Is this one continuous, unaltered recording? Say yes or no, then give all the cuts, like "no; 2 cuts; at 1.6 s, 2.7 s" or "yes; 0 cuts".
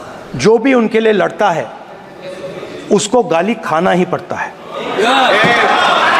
yes; 0 cuts